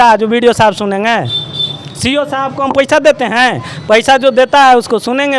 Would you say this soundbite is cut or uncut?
uncut